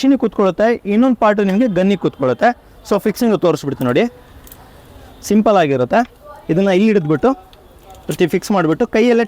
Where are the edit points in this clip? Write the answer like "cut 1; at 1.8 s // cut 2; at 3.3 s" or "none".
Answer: none